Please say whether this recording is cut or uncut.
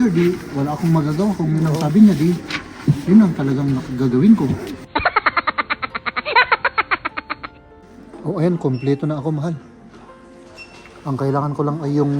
cut